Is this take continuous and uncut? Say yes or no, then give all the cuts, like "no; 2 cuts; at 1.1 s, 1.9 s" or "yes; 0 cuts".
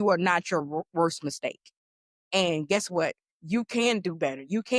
yes; 0 cuts